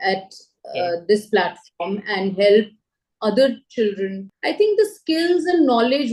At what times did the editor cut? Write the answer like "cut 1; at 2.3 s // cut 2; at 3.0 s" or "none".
cut 1; at 4.3 s